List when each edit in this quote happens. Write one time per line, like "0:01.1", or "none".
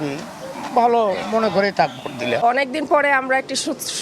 0:02.3